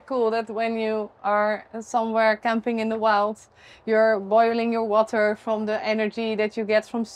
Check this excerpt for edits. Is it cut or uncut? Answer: uncut